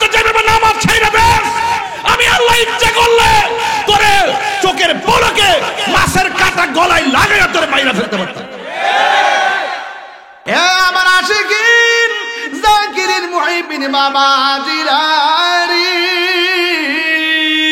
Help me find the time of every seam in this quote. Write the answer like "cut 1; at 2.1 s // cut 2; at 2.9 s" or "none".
cut 1; at 10.3 s